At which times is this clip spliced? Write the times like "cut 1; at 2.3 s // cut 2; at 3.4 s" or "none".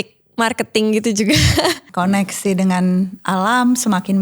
cut 1; at 1.8 s